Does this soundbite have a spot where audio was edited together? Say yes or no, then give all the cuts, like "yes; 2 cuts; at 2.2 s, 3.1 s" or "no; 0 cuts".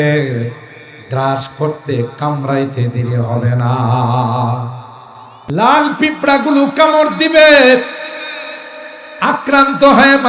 yes; 1 cut; at 5.5 s